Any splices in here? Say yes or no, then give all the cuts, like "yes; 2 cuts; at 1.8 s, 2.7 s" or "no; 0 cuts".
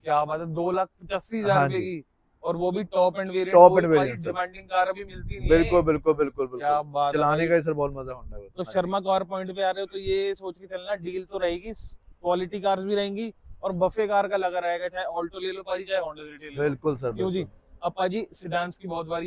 no; 0 cuts